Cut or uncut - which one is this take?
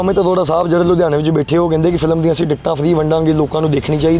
uncut